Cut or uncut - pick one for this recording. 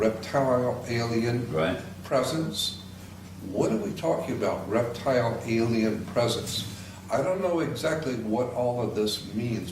cut